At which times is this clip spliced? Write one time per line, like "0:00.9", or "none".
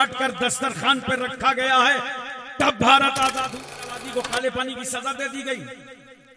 0:03.4